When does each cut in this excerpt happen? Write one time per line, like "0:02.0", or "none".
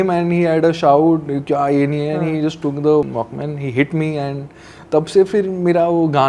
0:03.1